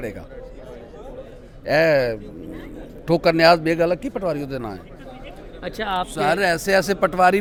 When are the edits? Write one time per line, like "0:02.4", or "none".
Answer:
none